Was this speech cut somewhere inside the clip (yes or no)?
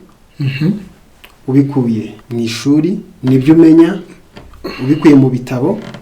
yes